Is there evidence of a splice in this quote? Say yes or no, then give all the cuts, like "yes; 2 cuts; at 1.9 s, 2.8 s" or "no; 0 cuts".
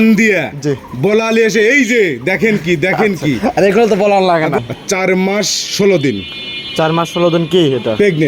yes; 1 cut; at 4.6 s